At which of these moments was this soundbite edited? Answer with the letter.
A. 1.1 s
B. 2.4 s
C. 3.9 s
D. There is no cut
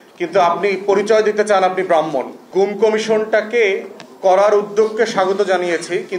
B